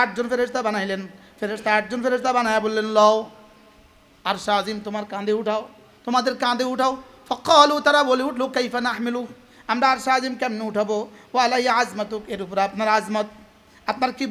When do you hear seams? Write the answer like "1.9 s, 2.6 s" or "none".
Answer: none